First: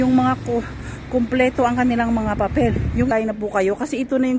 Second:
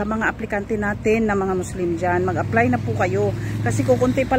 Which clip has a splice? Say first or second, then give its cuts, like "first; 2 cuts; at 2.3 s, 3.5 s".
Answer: first; 1 cut; at 3.1 s